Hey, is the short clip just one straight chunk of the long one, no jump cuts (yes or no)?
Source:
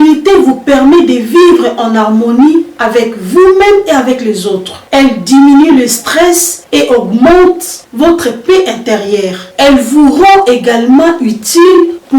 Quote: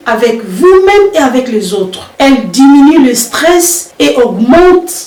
yes